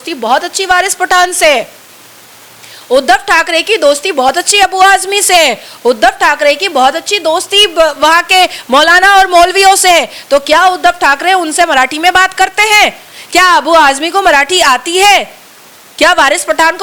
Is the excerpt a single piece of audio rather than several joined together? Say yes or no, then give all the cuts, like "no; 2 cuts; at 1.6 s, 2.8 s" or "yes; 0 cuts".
yes; 0 cuts